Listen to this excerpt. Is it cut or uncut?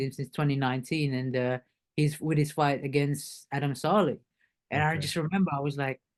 uncut